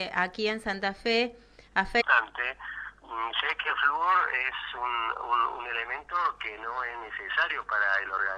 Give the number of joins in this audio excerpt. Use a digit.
0